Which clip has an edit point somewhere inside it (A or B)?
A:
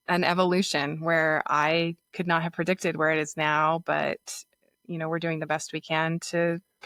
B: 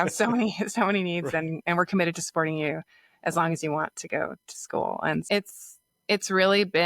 B